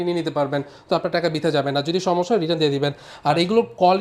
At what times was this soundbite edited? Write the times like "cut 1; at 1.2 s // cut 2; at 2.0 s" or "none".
none